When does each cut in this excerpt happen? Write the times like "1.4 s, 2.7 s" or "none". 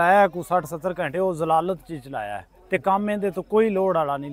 none